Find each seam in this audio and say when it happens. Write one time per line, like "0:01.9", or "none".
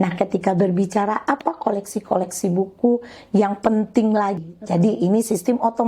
0:04.4